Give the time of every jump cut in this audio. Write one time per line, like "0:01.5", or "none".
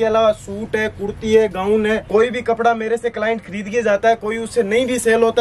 0:02.0